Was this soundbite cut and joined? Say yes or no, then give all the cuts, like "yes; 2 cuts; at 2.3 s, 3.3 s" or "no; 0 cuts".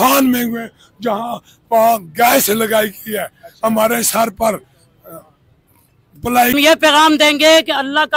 yes; 1 cut; at 6.5 s